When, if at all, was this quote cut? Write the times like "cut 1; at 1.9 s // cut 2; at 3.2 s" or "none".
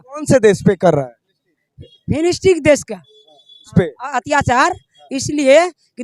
none